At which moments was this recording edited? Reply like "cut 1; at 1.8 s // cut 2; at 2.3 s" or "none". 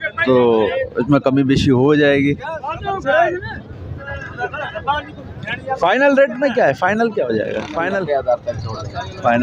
cut 1; at 8.0 s